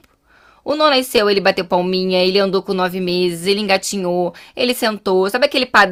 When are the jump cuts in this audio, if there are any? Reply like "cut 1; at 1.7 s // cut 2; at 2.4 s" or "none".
none